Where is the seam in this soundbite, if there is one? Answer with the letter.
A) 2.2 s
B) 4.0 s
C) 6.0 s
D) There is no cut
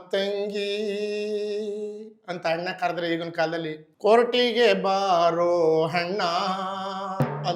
D